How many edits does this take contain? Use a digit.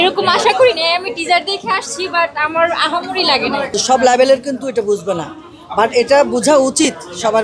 1